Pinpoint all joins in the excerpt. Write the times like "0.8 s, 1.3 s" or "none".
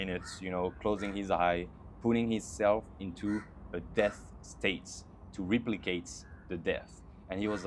none